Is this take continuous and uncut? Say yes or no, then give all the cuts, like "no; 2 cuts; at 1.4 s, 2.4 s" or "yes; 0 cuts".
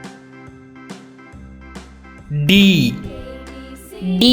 no; 1 cut; at 2.3 s